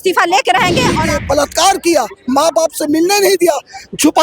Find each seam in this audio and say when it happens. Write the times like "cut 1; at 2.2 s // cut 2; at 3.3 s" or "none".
cut 1; at 1.0 s